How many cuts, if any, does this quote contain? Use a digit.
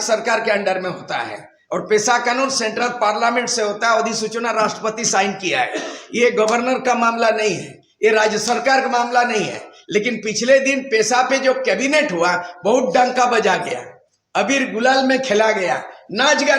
0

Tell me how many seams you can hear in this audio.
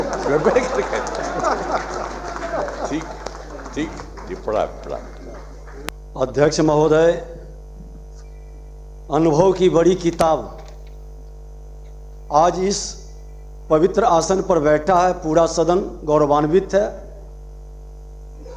1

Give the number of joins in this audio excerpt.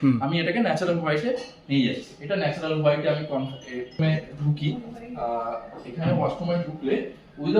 1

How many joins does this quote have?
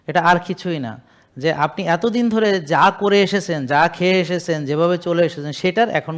0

